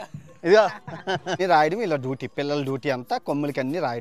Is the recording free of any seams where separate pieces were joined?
no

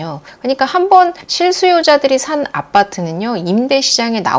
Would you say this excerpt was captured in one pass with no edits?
yes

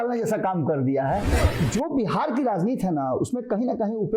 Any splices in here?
yes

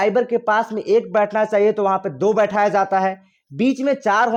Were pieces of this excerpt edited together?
no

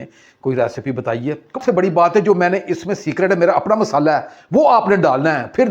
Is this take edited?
yes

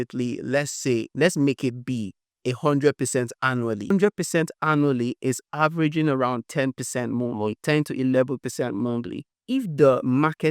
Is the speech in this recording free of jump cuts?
no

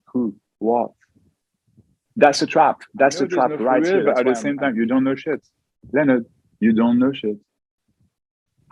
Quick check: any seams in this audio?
yes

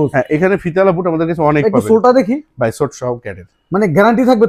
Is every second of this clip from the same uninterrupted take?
yes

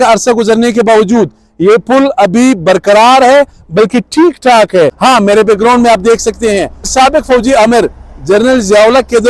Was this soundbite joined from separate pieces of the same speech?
yes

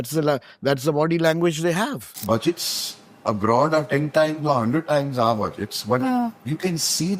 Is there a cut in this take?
yes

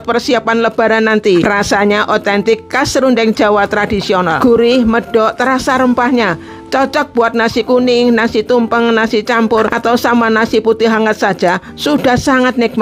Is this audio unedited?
no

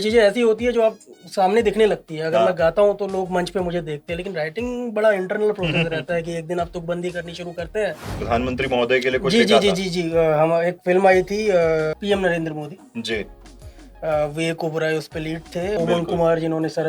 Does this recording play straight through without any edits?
no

